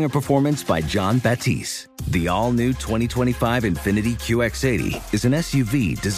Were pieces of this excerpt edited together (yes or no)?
no